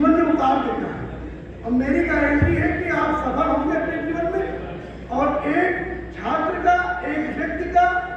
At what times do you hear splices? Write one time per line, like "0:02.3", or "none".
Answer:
none